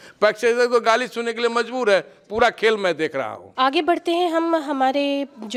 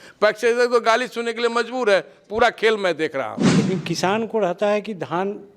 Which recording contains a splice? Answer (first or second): second